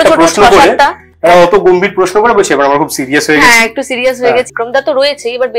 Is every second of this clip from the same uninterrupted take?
no; 1 cut; at 4.5 s

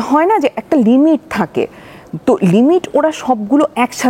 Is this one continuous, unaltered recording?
yes; 0 cuts

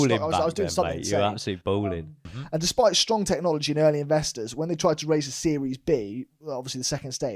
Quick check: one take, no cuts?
no; 1 cut; at 1.7 s

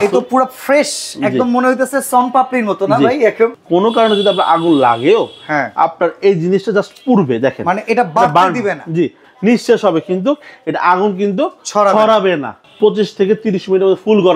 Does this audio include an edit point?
yes; 3 cuts; at 3.6 s, 9.2 s, 12.6 s

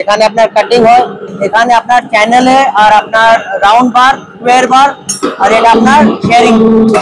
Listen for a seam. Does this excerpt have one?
no; 0 cuts

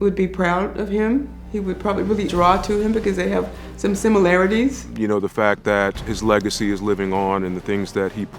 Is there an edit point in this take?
yes; 2 cuts; at 2.3 s, 4.9 s

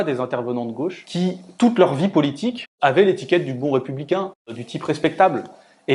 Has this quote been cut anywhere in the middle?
yes; 3 cuts; at 1.0 s, 2.7 s, 4.6 s

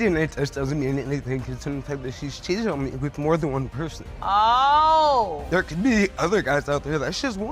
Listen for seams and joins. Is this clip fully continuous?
yes; 0 cuts

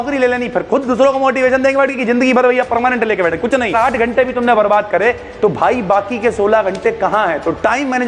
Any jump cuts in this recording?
yes; 1 cut; at 3.7 s

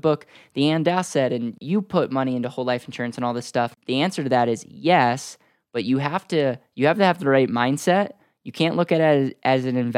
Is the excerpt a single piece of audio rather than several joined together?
no; 2 cuts; at 1.6 s, 3.7 s

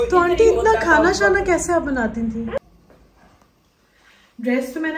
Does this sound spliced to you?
yes; 1 cut; at 2.6 s

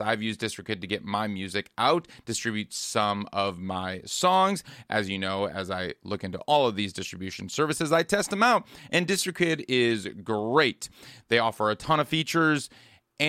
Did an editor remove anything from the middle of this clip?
no; 0 cuts

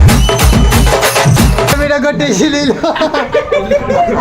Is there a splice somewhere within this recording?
yes; 1 cut; at 1.8 s

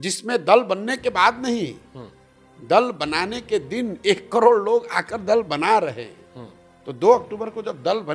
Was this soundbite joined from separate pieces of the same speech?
no; 0 cuts

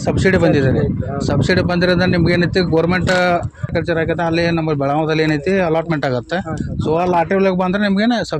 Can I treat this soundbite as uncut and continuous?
no; 1 cut; at 3.7 s

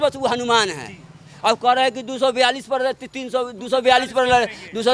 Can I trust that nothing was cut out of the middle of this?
yes; 0 cuts

